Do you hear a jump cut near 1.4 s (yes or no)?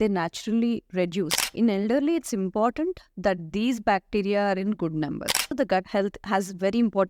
yes